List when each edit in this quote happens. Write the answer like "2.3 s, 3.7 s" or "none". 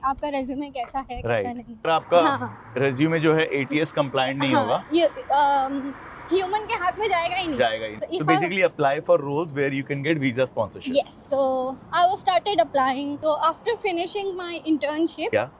1.8 s, 7.9 s, 13.2 s